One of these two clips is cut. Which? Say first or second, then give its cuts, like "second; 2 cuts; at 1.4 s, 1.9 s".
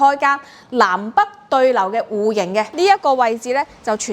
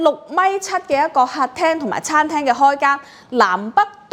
first; 1 cut; at 2.7 s